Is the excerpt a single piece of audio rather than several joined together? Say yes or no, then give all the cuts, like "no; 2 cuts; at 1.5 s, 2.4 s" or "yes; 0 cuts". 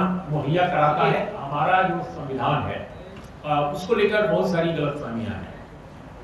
no; 1 cut; at 1.4 s